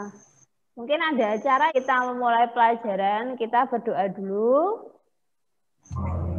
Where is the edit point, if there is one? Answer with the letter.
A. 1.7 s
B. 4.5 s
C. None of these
A